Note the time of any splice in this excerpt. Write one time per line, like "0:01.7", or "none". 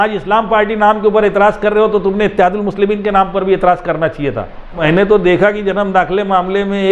0:04.8